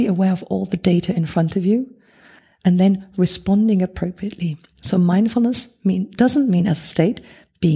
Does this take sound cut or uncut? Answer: uncut